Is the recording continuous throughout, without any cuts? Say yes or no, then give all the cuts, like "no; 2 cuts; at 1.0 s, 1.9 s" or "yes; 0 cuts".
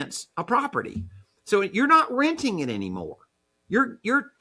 yes; 0 cuts